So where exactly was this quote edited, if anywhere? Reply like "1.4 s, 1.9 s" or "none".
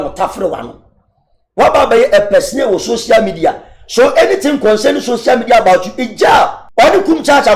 6.6 s